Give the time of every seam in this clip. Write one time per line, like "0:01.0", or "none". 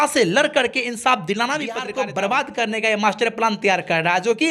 0:01.9